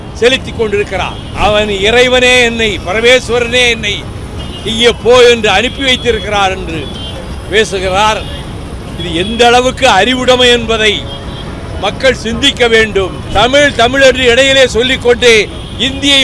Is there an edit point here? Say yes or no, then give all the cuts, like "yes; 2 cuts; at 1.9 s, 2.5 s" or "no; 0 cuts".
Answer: yes; 2 cuts; at 1.2 s, 13.2 s